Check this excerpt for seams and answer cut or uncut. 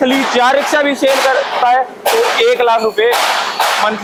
uncut